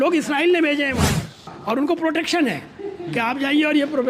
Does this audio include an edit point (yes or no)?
yes